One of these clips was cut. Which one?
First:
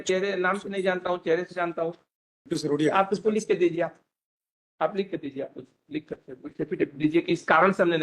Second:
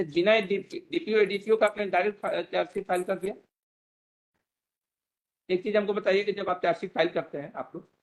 first; 1 cut; at 2.4 s

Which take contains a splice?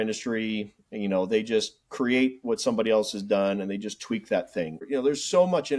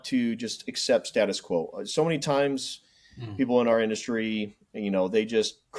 first; 1 cut; at 4.9 s

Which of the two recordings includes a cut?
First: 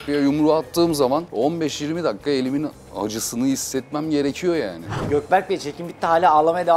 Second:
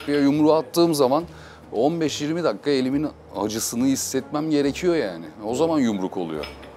first; 2 cuts; at 1.3 s, 5.0 s

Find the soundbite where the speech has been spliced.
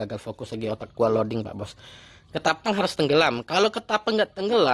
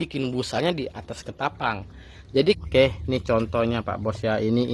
second; 1 cut; at 2.6 s

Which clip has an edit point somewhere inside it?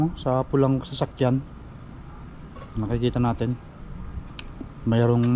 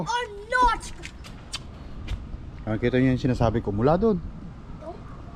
second; 1 cut; at 1.1 s

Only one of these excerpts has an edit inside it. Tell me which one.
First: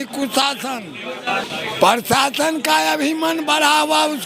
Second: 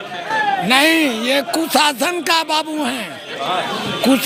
first; 1 cut; at 1.5 s

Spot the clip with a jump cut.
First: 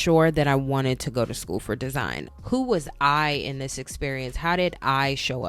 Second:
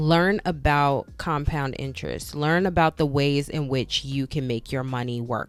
first; 1 cut; at 2.2 s

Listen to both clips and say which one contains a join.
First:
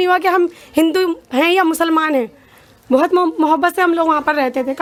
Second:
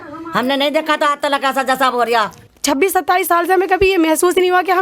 second; 1 cut; at 2.4 s

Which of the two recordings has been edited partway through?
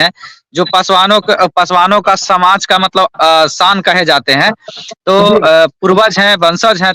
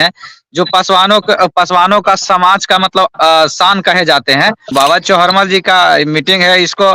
second; 1 cut; at 4.7 s

